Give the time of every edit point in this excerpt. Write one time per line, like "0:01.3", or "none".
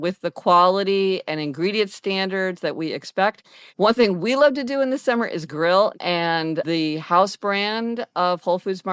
0:03.6
0:06.0